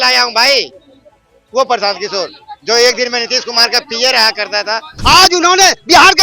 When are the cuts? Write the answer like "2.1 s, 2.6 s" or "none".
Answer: 4.9 s